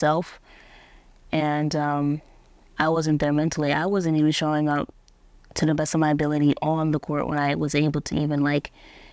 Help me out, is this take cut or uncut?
uncut